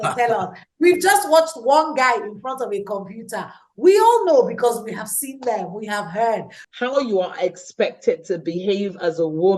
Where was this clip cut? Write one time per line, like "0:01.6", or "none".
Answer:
0:06.6